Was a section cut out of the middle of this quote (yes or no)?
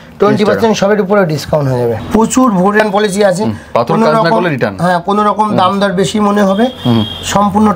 yes